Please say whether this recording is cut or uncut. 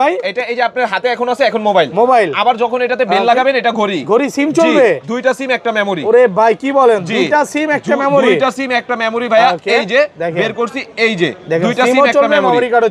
uncut